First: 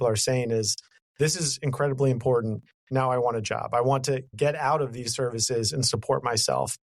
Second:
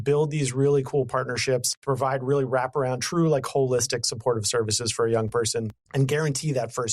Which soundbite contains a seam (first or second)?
second